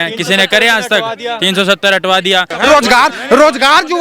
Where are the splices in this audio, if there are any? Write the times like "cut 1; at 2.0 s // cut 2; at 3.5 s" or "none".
cut 1; at 2.5 s

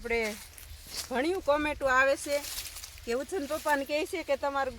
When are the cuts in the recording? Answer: none

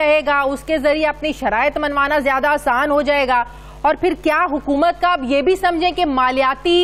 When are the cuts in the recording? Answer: none

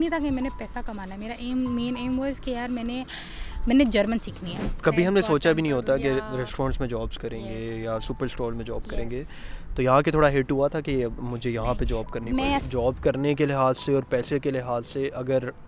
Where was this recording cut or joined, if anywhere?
cut 1; at 4.6 s // cut 2; at 12.6 s

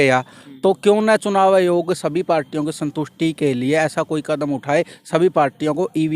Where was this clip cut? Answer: none

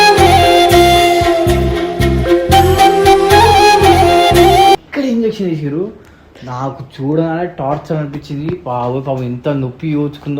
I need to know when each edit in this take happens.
cut 1; at 4.9 s

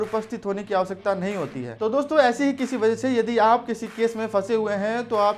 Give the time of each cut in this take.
cut 1; at 1.7 s

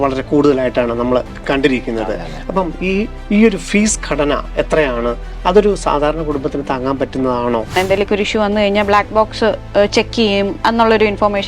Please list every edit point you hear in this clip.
cut 1; at 7.7 s

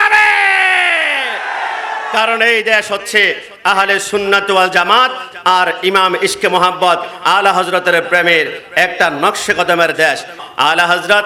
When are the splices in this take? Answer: none

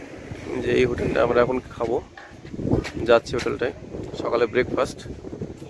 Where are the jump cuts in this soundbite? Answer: none

